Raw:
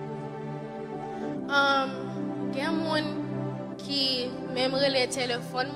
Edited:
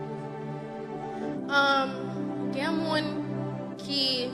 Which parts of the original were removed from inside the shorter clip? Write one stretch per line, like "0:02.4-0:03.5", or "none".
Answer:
none